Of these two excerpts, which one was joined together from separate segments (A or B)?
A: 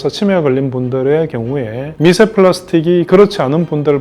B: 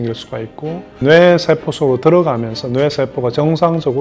A